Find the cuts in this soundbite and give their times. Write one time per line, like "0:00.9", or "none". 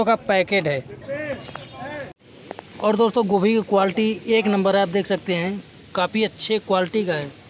0:02.2

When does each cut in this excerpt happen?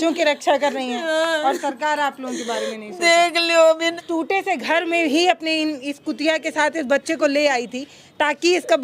0:03.9

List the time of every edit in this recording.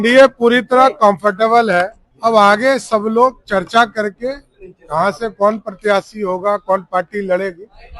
0:02.0

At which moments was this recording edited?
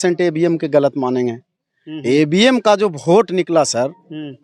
none

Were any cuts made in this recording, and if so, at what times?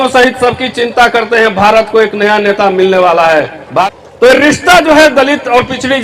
0:03.9

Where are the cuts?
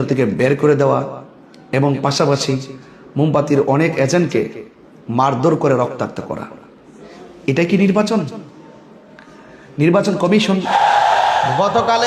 0:10.7

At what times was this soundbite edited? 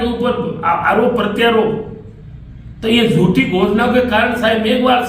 none

